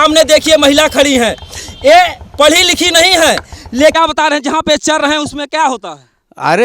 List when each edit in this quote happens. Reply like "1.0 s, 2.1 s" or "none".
3.9 s